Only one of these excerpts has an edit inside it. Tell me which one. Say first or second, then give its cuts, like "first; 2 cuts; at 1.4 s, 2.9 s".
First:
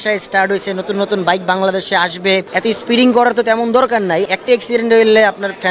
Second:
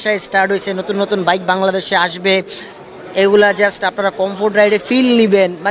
first; 2 cuts; at 2.5 s, 4.3 s